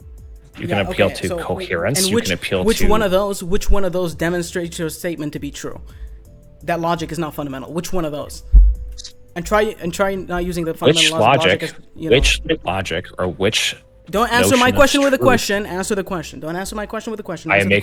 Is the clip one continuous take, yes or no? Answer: yes